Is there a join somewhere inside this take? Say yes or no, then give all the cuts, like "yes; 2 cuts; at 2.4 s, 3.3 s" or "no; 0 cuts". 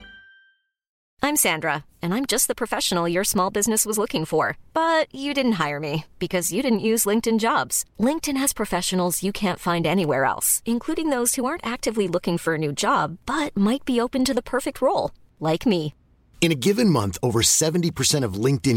yes; 1 cut; at 1.0 s